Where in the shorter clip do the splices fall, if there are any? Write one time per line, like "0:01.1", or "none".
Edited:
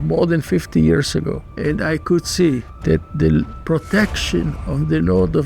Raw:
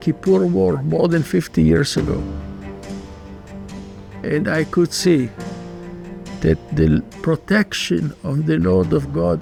0:01.4
0:02.7